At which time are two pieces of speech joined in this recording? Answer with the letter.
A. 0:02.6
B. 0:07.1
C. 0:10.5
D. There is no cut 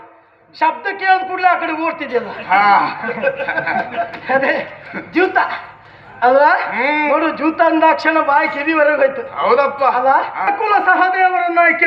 C